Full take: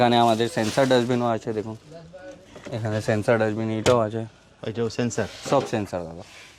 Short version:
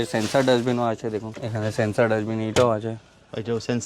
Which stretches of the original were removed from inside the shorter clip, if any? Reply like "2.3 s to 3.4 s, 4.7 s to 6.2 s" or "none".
1.8 s to 2.7 s